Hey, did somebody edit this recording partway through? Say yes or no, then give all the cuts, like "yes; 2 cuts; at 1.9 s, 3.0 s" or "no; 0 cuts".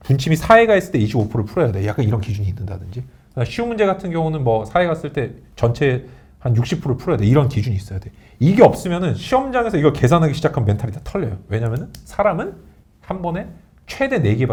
no; 0 cuts